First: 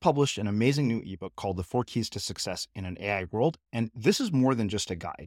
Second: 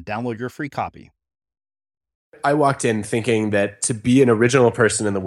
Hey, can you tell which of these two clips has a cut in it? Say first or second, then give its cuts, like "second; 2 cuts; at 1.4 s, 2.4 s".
second; 1 cut; at 2.4 s